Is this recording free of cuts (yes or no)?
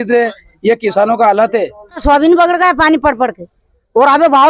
no